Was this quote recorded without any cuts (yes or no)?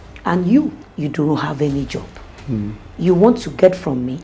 no